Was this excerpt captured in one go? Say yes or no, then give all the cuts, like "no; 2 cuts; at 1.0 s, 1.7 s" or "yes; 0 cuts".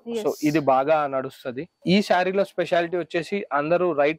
no; 1 cut; at 1.8 s